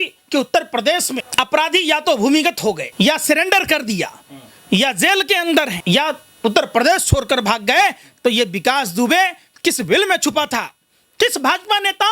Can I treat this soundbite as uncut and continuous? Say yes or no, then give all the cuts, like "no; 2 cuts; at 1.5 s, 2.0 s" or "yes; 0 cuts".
no; 3 cuts; at 1.3 s, 2.9 s, 5.8 s